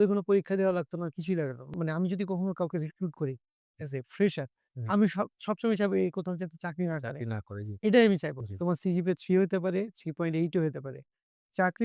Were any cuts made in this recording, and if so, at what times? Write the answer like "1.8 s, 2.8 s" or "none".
1.7 s, 8.4 s